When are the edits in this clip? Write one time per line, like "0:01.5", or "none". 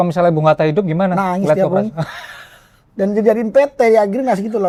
none